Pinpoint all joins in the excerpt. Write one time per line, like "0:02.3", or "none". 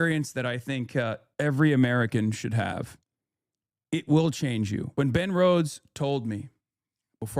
0:04.9